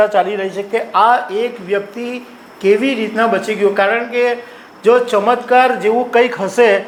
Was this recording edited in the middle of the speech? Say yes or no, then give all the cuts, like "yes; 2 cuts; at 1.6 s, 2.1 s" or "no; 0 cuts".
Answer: no; 0 cuts